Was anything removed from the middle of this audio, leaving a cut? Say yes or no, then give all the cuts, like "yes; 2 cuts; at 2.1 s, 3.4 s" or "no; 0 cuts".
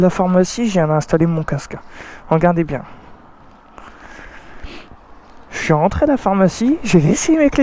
no; 0 cuts